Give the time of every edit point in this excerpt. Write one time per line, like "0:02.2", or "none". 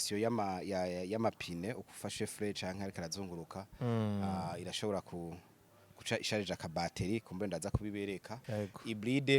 0:08.4